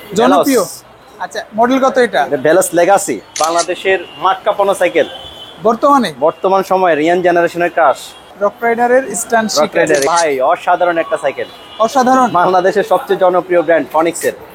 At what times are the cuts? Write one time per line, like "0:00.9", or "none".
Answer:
0:03.4
0:08.3
0:10.0